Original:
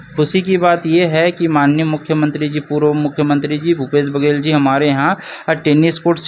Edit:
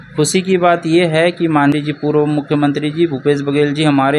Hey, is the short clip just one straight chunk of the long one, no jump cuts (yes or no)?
no